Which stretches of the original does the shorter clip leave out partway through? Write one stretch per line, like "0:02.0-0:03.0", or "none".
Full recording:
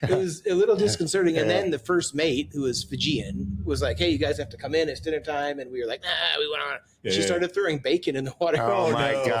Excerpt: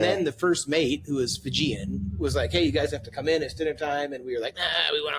none